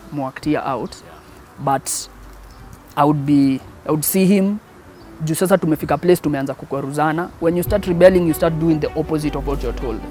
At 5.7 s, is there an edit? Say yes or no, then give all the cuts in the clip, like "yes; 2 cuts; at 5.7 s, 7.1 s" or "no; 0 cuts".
no; 0 cuts